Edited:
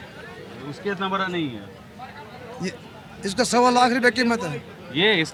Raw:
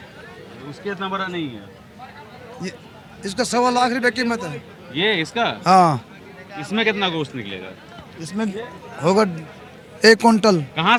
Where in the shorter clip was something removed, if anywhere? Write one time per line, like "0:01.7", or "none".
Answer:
none